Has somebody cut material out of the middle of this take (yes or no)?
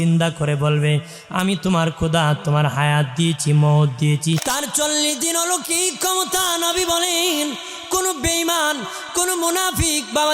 yes